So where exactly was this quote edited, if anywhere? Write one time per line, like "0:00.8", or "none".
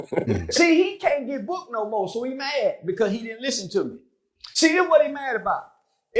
none